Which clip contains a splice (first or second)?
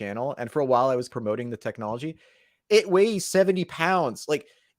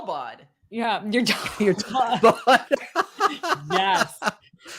first